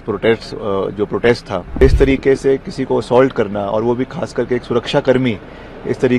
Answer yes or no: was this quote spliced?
yes